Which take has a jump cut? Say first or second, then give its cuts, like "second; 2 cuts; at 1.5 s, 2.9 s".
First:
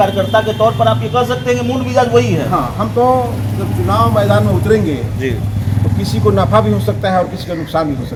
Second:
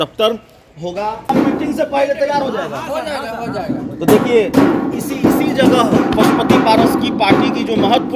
second; 1 cut; at 1.3 s